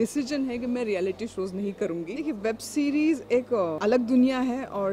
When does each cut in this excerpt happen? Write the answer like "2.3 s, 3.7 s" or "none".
2.2 s, 3.5 s

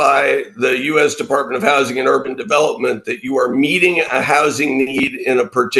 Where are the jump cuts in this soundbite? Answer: none

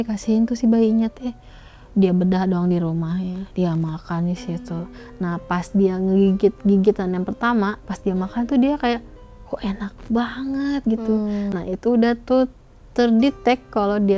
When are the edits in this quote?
7.9 s, 11.5 s

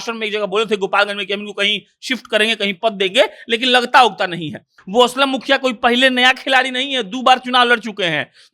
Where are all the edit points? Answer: 4.8 s

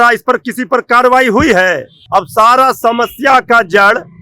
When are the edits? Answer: 1.9 s

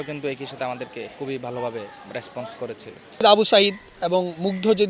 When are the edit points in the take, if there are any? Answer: 3.2 s

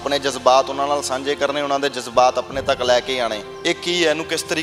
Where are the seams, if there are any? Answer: 3.5 s

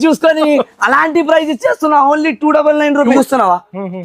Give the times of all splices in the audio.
3.1 s

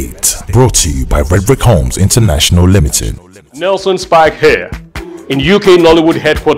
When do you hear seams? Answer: 3.5 s

